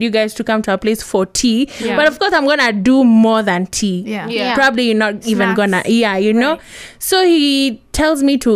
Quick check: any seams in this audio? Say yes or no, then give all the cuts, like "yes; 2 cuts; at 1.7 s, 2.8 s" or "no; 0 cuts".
no; 0 cuts